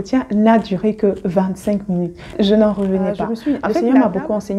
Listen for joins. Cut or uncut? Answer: cut